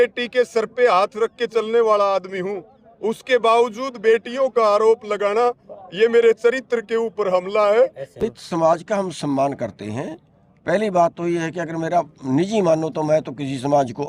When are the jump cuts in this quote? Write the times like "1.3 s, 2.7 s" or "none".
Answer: 8.2 s